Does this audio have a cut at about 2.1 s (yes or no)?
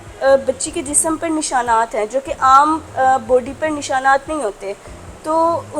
no